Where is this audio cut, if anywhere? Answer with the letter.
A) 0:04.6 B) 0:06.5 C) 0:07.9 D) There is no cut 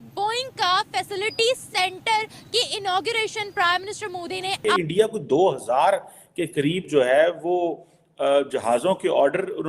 A